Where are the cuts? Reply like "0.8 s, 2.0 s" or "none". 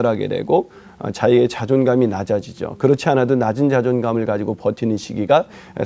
none